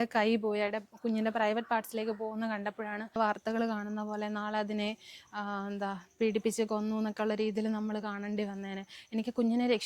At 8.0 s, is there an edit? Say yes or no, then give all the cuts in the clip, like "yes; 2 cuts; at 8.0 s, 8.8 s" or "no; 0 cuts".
no; 1 cut; at 3.2 s